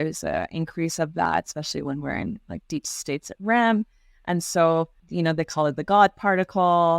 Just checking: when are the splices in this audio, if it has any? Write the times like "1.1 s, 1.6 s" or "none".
5.0 s